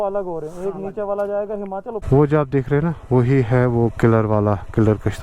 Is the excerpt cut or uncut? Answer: cut